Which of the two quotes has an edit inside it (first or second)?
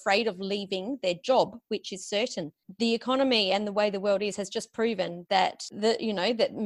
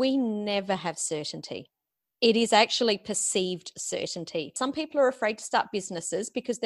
second